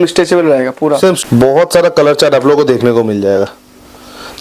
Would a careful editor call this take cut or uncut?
cut